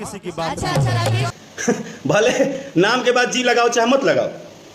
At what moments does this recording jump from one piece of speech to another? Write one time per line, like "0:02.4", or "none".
0:01.2